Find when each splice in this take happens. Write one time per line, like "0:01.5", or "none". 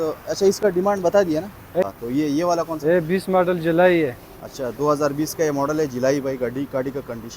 0:01.8